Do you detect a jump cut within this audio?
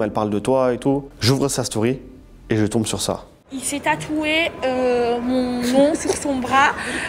no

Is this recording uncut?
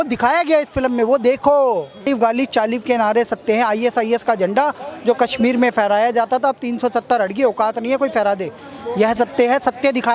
no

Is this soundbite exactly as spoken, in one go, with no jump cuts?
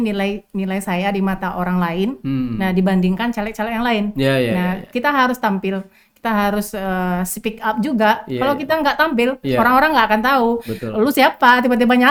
yes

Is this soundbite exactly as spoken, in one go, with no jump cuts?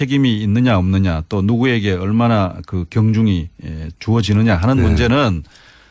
yes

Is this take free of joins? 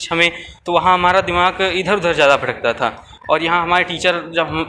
yes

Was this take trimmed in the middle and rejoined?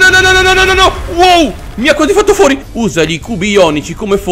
yes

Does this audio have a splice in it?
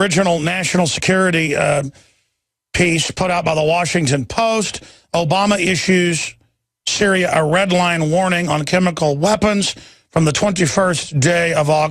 no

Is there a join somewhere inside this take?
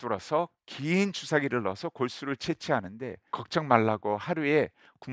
yes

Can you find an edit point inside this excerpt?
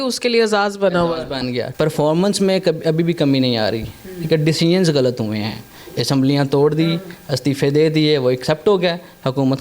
yes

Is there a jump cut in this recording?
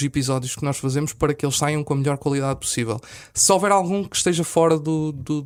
no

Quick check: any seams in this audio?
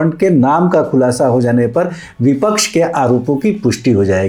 no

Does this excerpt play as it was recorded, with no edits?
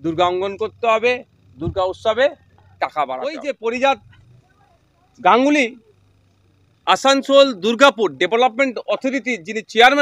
no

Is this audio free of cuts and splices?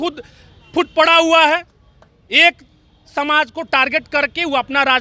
yes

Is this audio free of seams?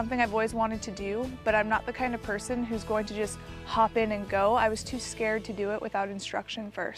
yes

